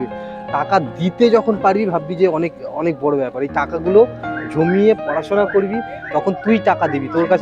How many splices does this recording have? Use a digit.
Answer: 1